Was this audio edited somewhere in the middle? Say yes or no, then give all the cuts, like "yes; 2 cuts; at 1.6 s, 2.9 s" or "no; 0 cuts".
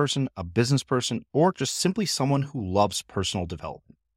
no; 0 cuts